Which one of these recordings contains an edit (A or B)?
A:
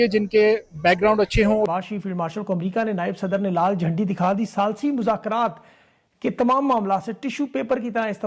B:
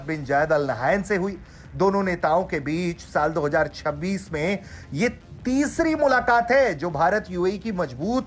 A